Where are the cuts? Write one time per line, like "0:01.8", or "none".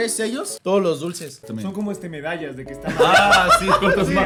none